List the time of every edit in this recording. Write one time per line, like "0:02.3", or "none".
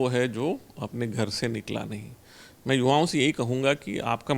none